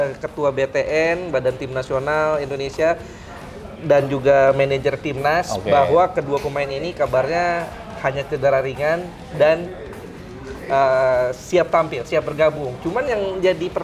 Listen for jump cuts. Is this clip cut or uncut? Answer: uncut